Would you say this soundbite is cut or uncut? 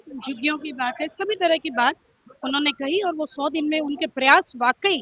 uncut